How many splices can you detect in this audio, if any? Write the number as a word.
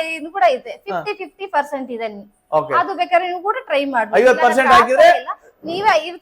zero